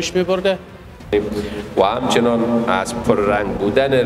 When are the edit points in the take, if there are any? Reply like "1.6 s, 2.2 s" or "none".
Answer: 1.1 s